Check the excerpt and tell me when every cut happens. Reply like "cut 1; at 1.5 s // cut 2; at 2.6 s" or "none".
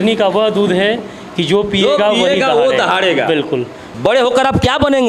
cut 1; at 3.8 s